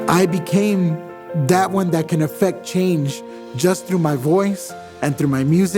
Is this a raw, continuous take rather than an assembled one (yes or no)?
yes